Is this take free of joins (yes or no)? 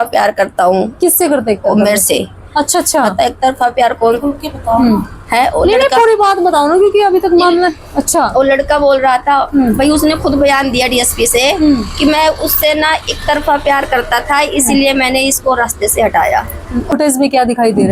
no